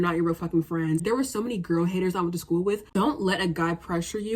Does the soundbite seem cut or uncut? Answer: cut